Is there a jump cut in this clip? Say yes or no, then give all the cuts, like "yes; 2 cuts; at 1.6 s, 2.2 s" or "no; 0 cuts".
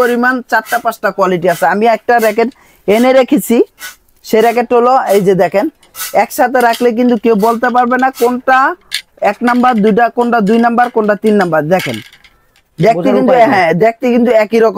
no; 0 cuts